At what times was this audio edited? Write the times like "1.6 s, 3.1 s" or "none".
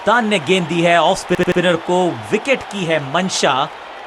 none